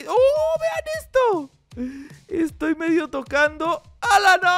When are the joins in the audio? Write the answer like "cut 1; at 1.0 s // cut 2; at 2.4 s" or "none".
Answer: none